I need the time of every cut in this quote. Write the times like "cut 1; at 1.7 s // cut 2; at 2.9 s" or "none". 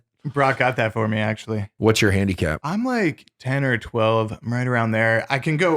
cut 1; at 1.7 s // cut 2; at 2.6 s